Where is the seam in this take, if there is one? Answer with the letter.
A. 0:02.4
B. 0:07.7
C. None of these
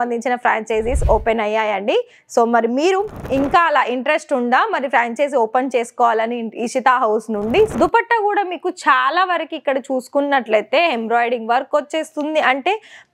B